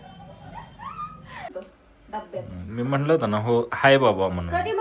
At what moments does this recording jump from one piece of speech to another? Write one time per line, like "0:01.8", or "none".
0:01.5